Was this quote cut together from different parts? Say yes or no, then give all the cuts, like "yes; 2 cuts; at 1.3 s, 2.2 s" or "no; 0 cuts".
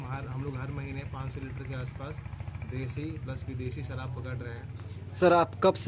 no; 0 cuts